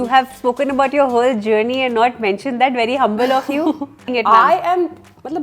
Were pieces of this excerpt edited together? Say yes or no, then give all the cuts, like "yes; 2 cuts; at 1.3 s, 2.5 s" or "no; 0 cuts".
yes; 1 cut; at 4.1 s